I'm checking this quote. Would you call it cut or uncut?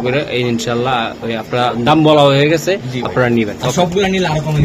uncut